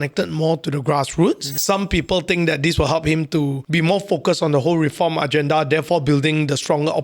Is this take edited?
yes; 2 cuts; at 1.6 s, 3.6 s

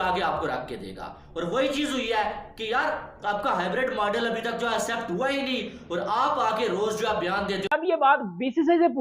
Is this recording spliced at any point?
yes; 1 cut; at 7.7 s

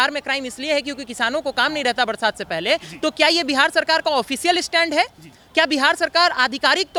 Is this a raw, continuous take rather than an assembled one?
yes; 0 cuts

